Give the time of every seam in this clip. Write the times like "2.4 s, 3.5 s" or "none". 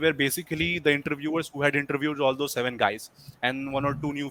none

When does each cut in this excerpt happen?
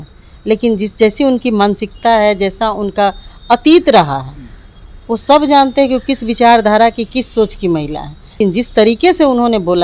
8.2 s

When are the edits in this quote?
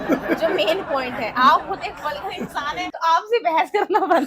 2.9 s

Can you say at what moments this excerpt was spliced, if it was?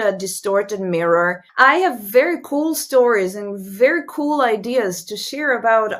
1.4 s

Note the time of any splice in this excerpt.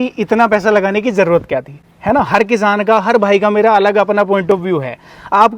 none

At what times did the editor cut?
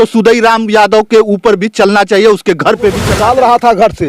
3.1 s

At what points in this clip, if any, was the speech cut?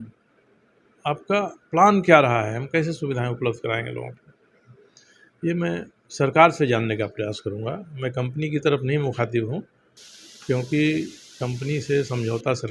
none

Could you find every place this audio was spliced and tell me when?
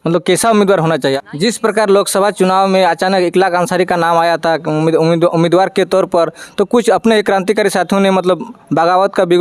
1.2 s

